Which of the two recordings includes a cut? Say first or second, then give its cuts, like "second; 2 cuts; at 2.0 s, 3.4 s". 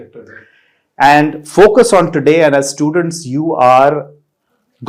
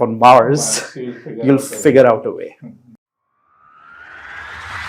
second; 1 cut; at 2.9 s